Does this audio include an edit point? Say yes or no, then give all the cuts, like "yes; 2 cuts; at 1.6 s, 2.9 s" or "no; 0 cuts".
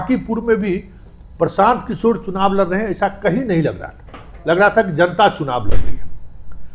no; 0 cuts